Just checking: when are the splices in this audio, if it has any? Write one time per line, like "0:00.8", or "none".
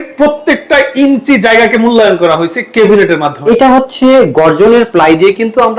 0:03.3